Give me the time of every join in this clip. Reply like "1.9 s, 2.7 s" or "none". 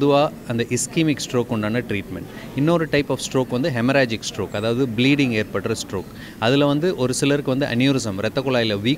none